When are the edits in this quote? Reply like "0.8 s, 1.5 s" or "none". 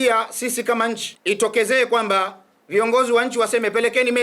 1.1 s

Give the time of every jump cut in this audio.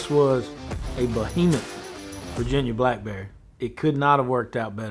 none

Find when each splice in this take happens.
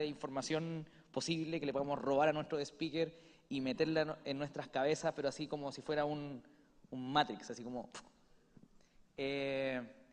none

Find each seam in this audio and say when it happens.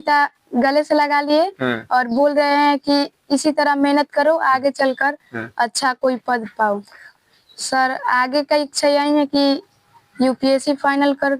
7.0 s

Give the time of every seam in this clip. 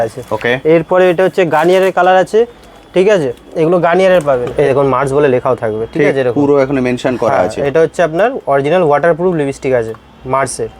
4.5 s

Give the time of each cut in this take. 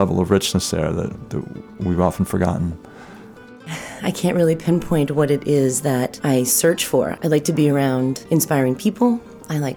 3.5 s, 6.1 s, 7.1 s, 8.2 s

